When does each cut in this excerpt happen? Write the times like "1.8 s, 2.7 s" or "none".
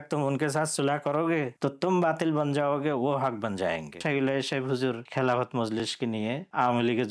1.5 s, 4.0 s, 5.0 s, 6.0 s